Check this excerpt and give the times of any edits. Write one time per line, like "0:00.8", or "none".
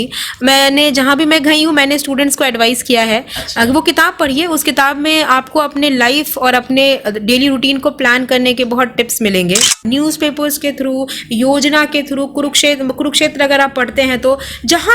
0:09.8